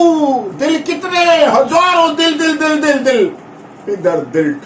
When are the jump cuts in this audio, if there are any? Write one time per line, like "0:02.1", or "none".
none